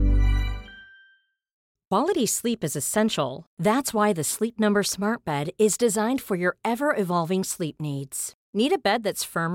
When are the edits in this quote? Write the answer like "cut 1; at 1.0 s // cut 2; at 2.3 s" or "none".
cut 1; at 1.6 s